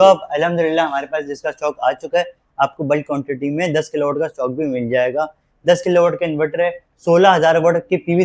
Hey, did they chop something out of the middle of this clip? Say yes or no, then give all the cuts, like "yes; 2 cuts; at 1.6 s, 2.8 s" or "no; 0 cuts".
yes; 1 cut; at 5.4 s